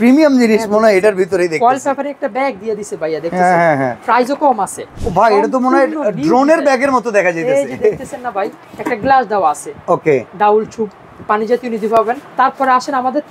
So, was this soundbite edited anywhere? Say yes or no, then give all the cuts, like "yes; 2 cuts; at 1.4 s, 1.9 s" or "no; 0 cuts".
yes; 3 cuts; at 4.9 s, 8.7 s, 12.2 s